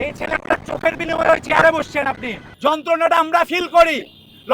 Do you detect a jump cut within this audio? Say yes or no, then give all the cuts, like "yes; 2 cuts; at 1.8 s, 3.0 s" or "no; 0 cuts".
yes; 1 cut; at 2.4 s